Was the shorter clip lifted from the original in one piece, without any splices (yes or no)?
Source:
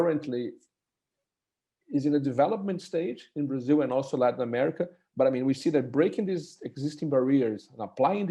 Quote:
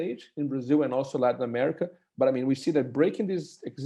yes